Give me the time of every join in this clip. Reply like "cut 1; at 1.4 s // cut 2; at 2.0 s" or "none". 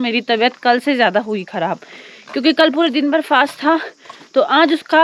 none